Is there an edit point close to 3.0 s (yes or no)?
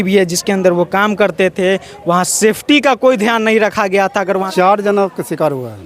no